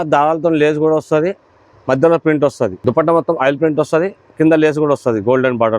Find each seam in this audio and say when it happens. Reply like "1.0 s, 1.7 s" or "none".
2.8 s